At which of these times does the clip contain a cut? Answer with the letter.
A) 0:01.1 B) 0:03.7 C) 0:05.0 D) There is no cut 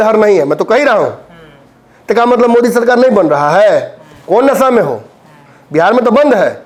D